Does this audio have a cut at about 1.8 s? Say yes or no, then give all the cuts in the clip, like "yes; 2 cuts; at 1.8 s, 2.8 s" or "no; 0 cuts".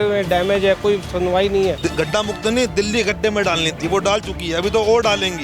yes; 1 cut; at 1.8 s